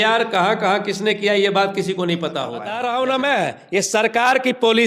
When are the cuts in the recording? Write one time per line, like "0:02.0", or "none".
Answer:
0:02.6

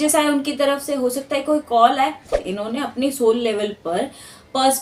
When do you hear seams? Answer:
0:02.5

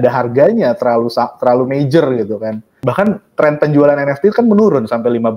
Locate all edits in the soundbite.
0:02.7

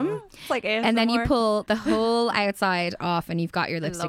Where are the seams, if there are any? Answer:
0:01.6

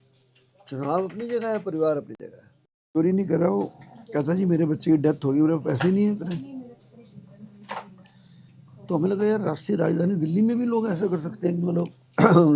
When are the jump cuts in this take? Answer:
0:03.0

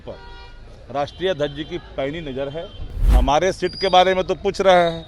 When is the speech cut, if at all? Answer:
0:03.1

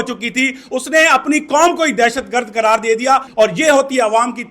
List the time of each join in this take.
0:03.3

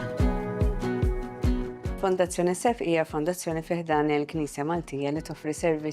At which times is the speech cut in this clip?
0:01.9

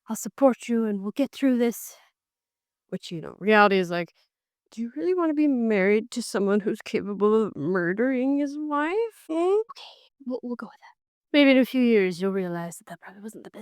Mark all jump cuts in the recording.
0:09.2
0:09.7

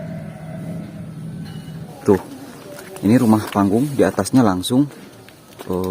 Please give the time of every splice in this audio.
0:01.9

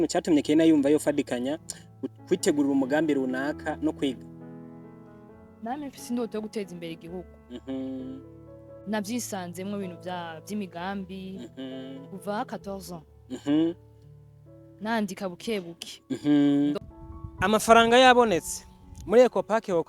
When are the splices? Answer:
0:16.8

